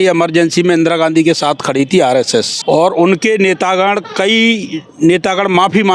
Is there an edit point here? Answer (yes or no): yes